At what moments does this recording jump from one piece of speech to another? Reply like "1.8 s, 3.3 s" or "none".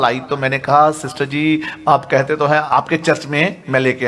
2.7 s